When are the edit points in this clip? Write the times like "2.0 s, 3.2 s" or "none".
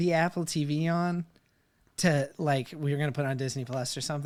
none